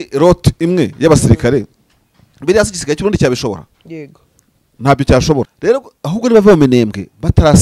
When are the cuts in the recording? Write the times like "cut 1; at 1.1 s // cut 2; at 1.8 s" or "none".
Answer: cut 1; at 5.5 s